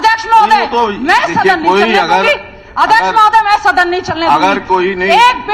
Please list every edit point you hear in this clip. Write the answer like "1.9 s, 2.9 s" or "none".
none